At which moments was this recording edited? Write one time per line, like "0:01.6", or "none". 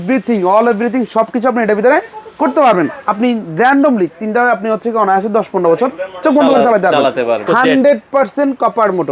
0:03.0
0:07.4